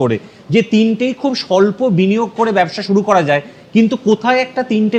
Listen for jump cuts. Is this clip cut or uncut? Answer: uncut